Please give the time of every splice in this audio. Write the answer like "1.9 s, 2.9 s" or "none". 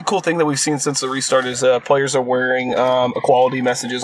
none